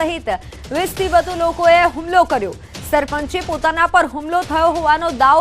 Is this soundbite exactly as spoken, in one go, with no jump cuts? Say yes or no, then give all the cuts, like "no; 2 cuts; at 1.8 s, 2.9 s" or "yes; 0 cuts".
yes; 0 cuts